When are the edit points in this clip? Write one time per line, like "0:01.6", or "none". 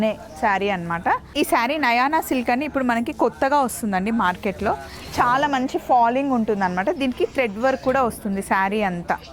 0:01.3